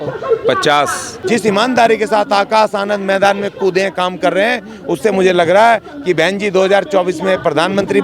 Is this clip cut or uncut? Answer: cut